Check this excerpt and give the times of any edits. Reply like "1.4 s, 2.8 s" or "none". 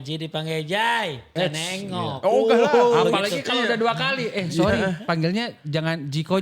1.3 s